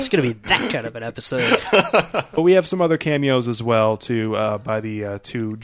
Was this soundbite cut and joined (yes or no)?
yes